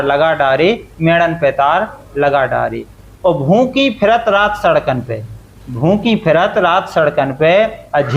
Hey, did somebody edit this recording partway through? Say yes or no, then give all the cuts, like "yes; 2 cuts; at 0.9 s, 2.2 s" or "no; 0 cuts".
no; 0 cuts